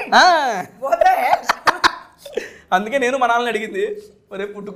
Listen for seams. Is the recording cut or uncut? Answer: uncut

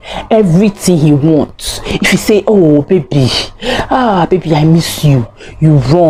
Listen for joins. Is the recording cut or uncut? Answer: uncut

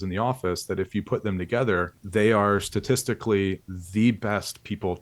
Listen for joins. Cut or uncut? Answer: cut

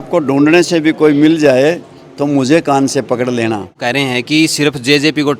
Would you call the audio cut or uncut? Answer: cut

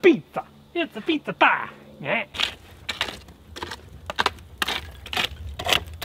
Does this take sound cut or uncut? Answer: uncut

